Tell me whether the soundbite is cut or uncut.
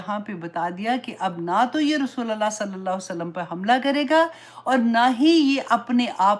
uncut